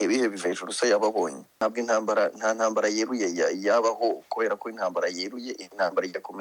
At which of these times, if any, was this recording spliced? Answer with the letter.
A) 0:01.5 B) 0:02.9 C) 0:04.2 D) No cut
A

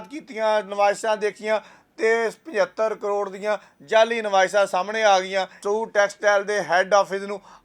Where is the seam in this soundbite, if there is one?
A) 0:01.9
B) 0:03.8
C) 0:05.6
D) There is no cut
C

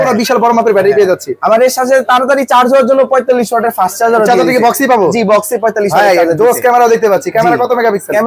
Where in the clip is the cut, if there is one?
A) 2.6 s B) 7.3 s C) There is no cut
C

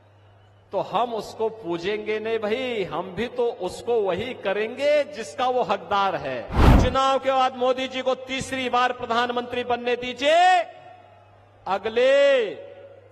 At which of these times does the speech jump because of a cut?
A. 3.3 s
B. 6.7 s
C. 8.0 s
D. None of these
B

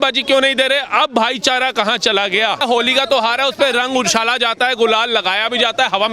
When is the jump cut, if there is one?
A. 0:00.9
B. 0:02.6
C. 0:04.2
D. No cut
B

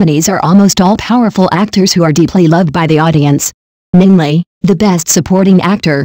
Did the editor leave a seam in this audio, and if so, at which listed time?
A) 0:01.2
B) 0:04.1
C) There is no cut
B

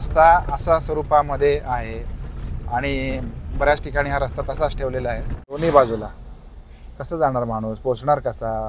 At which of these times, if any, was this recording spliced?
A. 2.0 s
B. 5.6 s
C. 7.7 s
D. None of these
B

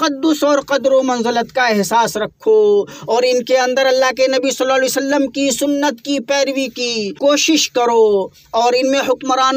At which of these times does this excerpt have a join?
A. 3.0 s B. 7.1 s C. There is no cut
B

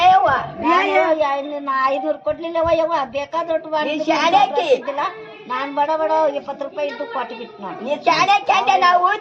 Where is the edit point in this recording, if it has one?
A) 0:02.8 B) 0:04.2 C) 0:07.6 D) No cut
D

